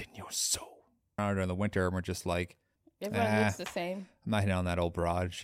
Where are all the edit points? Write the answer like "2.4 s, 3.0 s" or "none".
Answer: 1.2 s